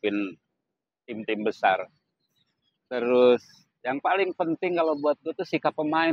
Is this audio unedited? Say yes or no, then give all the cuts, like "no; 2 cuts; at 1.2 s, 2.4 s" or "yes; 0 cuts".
yes; 0 cuts